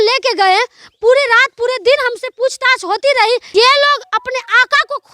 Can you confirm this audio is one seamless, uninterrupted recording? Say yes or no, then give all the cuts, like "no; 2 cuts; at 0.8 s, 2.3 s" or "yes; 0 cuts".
no; 1 cut; at 3.5 s